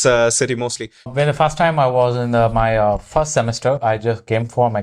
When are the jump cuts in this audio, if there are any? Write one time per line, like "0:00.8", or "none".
0:01.1